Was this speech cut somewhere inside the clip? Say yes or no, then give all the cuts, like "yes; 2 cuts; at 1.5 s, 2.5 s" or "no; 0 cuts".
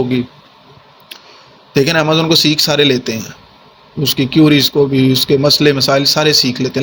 no; 0 cuts